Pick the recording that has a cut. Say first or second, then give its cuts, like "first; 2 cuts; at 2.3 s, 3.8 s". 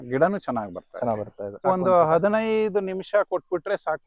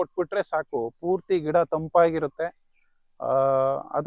first; 1 cut; at 1.6 s